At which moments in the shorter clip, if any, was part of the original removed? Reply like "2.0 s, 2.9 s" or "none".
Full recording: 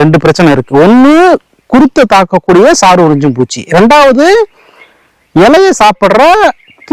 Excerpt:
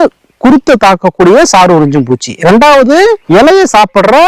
3.2 s

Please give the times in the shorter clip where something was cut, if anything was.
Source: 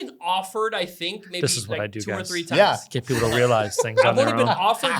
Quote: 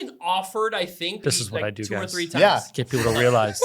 1.2 s

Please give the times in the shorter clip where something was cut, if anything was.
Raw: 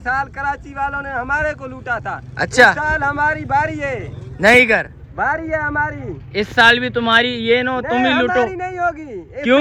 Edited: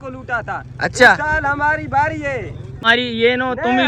2.8 s

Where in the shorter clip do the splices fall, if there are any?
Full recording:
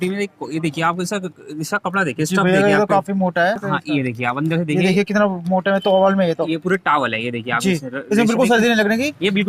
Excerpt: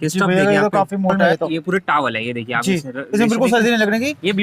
1.1 s

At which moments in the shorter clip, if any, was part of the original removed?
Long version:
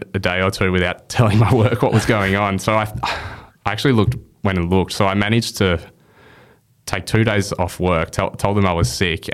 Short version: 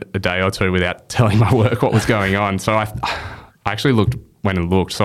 none

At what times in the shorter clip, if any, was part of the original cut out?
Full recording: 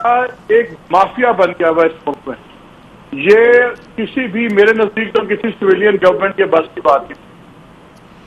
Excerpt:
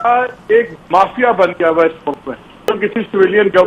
2.6 s

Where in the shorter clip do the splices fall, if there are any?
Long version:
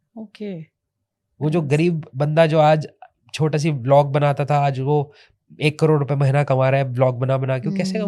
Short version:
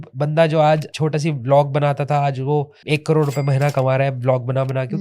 0.9 s, 2.8 s

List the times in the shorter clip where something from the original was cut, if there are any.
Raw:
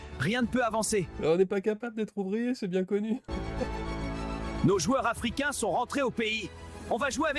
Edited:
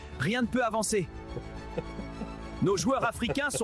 1.2 s

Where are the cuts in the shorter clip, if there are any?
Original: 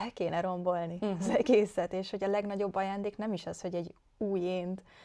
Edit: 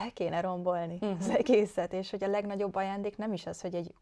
none

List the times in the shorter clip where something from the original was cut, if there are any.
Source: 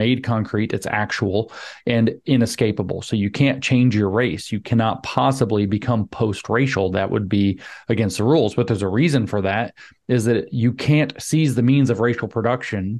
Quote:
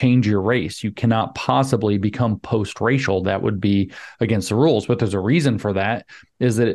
none

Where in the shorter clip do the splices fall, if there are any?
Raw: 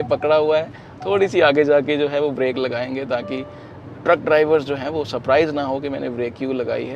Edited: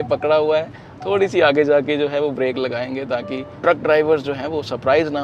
3.5 s

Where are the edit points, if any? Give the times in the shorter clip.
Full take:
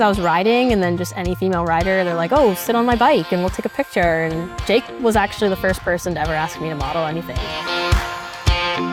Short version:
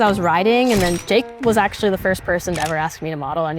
1.0 s

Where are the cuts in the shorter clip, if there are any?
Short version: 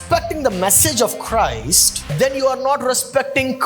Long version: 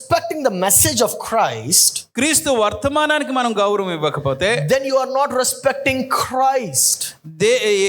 2.1 s

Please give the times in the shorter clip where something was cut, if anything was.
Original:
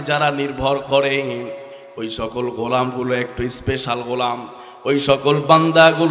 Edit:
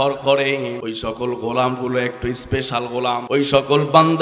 0.8 s, 3.2 s

